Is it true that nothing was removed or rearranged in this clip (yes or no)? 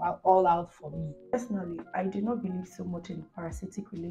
no